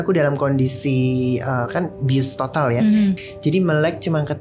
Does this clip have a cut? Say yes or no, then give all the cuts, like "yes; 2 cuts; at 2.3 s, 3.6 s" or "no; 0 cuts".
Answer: yes; 1 cut; at 3.2 s